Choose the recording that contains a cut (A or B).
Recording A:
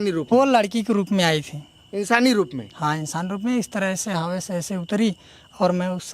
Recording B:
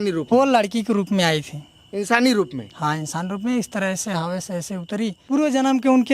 B